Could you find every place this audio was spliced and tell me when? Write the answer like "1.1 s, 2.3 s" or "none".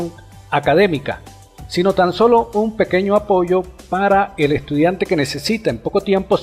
1.5 s